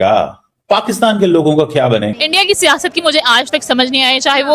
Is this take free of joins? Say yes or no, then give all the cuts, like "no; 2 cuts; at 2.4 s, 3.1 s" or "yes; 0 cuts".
no; 1 cut; at 2.1 s